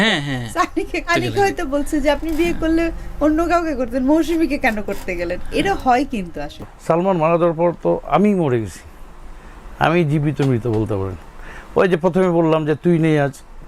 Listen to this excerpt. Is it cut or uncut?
cut